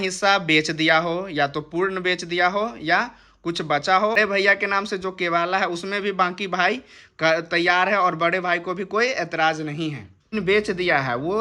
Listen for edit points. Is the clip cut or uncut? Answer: cut